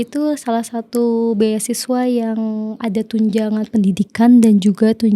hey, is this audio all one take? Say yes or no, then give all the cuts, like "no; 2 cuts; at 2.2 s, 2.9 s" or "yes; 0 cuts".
yes; 0 cuts